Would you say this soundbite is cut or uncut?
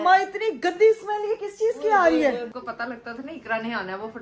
cut